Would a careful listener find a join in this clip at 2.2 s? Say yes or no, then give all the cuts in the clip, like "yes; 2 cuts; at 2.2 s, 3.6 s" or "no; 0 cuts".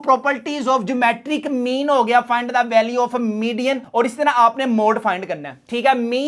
no; 0 cuts